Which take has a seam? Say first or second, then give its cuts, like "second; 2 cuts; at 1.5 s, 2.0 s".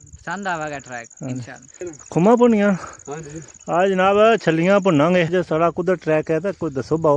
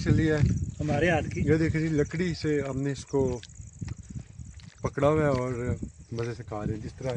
first; 2 cuts; at 1.9 s, 5.3 s